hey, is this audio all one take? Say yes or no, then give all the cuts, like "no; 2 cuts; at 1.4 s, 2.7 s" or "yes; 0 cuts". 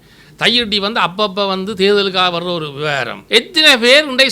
no; 1 cut; at 3.1 s